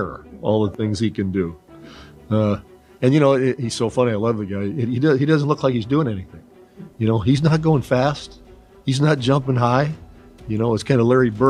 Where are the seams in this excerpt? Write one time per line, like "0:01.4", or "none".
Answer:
none